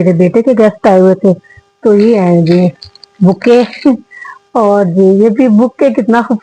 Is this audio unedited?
yes; 0 cuts

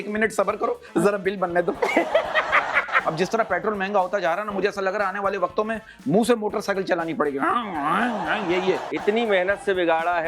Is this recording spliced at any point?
yes; 2 cuts; at 2.9 s, 8.9 s

